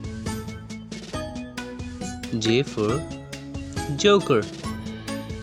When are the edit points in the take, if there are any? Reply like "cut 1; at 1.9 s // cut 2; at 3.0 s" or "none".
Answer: cut 1; at 1.8 s // cut 2; at 4.4 s